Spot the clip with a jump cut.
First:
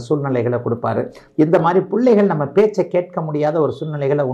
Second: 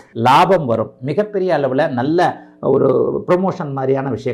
first; 1 cut; at 1.2 s

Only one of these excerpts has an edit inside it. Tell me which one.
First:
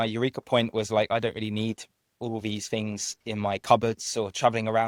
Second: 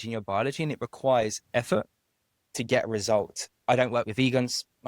second; 1 cut; at 3.5 s

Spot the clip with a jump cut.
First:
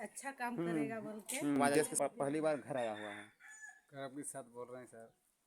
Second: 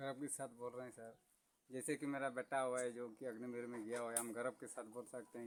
first; 1 cut; at 1.8 s

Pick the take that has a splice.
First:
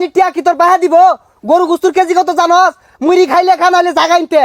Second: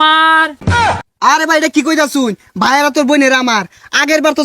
second; 1 cut; at 0.9 s

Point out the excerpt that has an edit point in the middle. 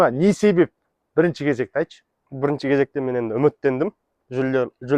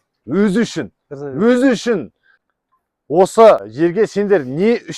second; 2 cuts; at 2.4 s, 3.7 s

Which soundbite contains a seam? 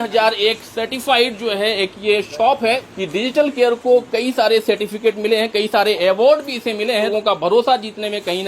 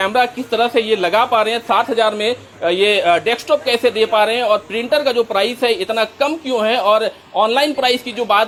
first; 2 cuts; at 2.9 s, 7.1 s

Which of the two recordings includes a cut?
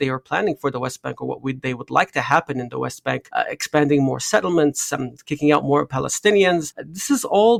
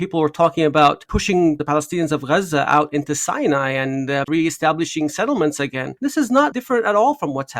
second; 3 cuts; at 1.5 s, 4.2 s, 6.5 s

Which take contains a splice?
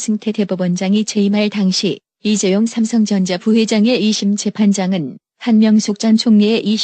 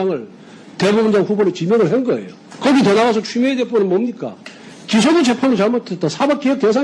second; 1 cut; at 5.9 s

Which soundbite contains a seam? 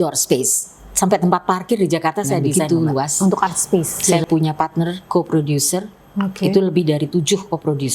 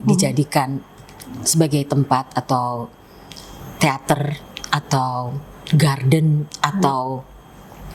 first; 1 cut; at 4.1 s

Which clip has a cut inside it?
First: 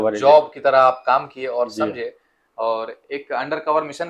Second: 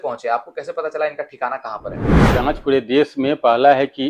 second; 1 cut; at 2.3 s

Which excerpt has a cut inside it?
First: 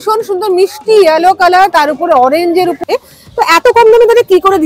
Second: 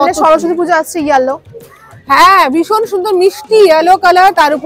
first; 1 cut; at 2.9 s

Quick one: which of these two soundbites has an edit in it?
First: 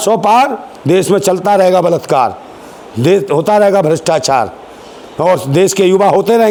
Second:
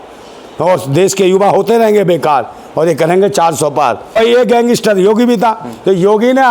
second; 1 cut; at 4.1 s

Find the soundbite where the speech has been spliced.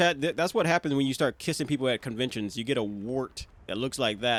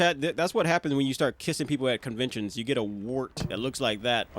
second; 1 cut; at 3.4 s

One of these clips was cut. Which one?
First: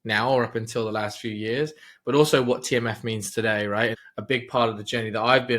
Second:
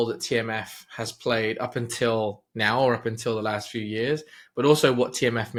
first; 1 cut; at 4.1 s

